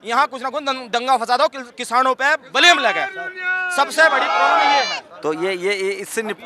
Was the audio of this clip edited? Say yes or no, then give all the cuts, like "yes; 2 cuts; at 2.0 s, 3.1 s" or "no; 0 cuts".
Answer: no; 0 cuts